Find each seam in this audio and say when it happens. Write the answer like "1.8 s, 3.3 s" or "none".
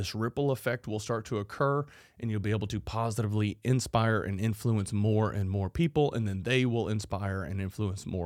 none

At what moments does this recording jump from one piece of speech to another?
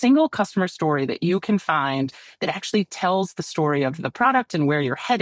none

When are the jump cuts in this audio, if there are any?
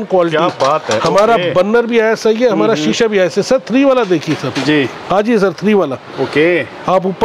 none

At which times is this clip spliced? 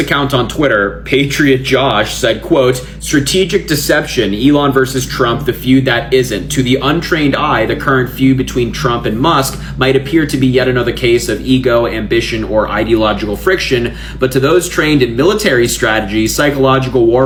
none

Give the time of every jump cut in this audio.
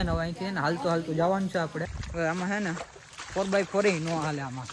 2.0 s

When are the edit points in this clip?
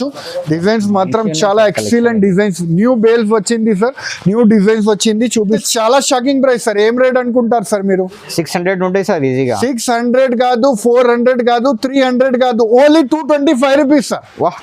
5.5 s

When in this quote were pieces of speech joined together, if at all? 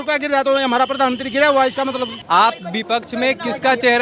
2.1 s

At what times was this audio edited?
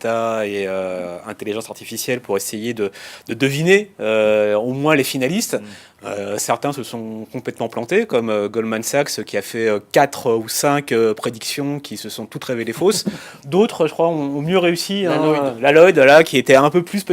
none

